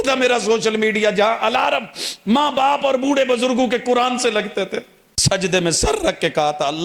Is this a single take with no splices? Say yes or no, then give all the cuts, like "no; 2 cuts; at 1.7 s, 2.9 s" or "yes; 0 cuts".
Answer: no; 1 cut; at 5.1 s